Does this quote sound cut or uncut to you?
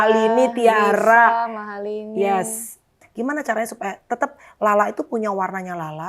cut